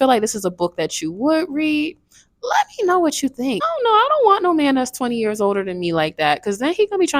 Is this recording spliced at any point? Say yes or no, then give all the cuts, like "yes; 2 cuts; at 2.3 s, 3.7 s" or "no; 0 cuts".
yes; 1 cut; at 3.6 s